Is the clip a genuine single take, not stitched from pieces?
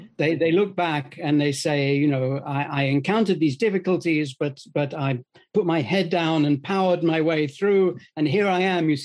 yes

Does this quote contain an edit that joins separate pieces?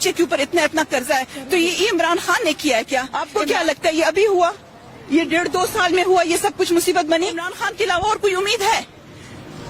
yes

